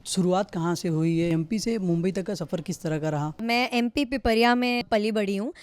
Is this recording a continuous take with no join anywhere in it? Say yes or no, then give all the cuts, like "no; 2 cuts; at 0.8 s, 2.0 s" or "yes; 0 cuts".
no; 3 cuts; at 1.3 s, 3.4 s, 4.9 s